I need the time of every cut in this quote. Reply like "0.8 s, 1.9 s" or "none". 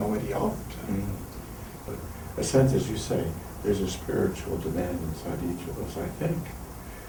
none